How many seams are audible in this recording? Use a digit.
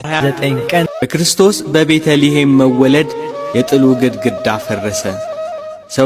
1